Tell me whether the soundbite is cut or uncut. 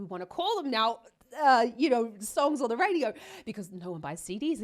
uncut